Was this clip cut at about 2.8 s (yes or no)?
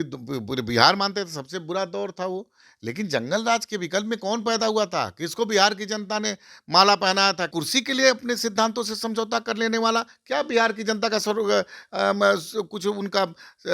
no